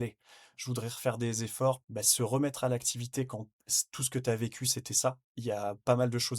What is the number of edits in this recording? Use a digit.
2